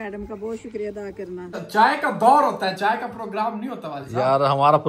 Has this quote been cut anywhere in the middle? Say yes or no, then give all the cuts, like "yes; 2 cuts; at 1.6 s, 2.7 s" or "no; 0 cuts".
yes; 1 cut; at 1.6 s